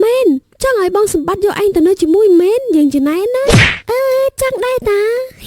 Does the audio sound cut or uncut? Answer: uncut